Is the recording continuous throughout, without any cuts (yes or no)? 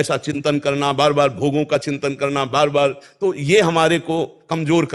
yes